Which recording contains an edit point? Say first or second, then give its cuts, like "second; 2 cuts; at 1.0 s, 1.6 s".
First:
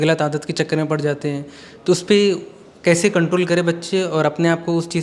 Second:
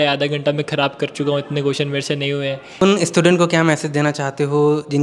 second; 1 cut; at 2.8 s